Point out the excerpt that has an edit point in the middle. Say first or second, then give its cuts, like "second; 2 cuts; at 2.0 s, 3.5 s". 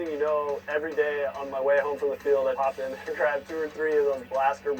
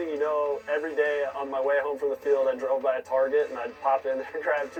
first; 1 cut; at 2.6 s